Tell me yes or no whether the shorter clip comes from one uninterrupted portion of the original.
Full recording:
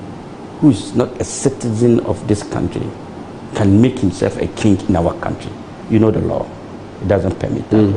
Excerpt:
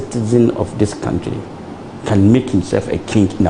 yes